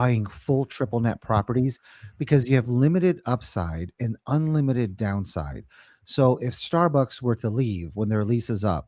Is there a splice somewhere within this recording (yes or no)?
no